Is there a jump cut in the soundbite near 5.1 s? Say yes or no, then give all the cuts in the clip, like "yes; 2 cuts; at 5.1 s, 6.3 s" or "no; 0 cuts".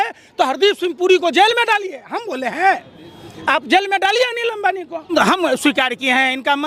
yes; 1 cut; at 5.1 s